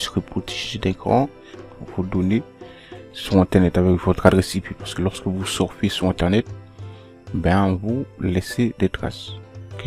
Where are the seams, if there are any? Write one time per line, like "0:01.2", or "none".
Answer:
0:01.8